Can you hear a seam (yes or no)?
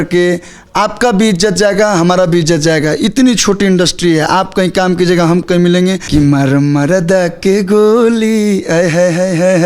yes